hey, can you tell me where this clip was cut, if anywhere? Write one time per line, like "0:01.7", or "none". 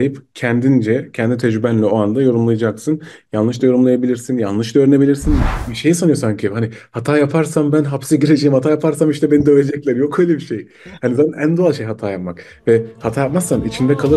0:05.4